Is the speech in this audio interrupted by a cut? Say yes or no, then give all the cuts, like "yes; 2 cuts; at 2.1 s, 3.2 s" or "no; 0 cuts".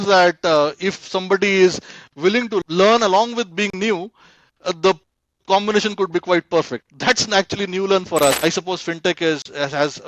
yes; 2 cuts; at 2.6 s, 8.4 s